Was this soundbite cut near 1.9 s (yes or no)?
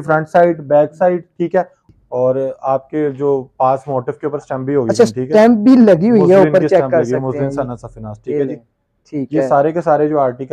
yes